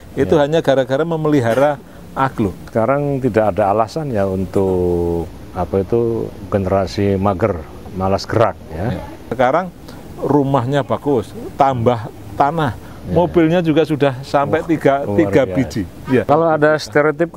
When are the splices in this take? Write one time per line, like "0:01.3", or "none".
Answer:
0:02.6
0:09.3
0:16.3